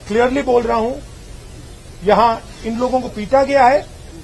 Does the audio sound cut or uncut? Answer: uncut